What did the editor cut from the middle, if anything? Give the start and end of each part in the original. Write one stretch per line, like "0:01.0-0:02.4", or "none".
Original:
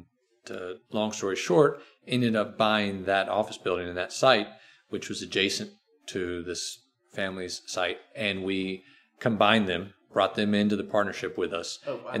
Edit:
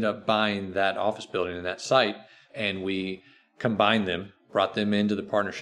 0:04.8-0:08.1